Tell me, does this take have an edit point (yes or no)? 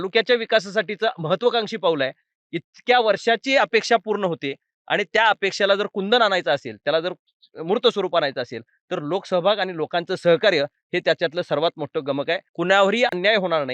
yes